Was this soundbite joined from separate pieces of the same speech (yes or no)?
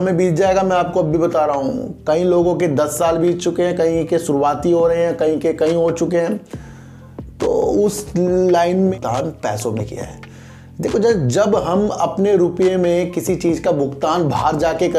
yes